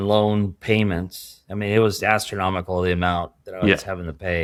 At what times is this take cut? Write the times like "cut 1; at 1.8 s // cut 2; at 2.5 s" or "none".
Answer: none